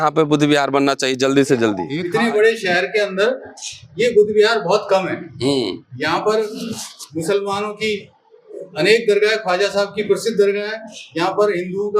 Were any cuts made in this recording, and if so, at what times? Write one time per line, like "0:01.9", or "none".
0:01.9